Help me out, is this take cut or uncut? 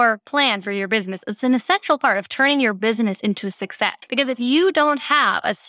cut